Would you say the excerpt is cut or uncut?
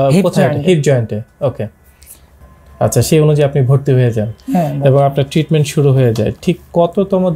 cut